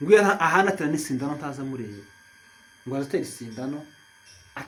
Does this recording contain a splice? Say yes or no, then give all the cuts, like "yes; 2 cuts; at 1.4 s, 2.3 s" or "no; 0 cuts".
no; 0 cuts